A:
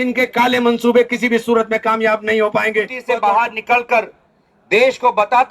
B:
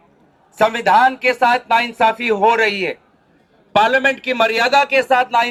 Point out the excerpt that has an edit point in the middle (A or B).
A